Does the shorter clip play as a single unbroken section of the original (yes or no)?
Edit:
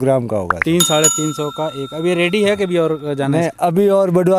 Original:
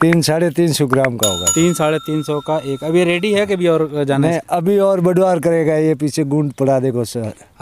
yes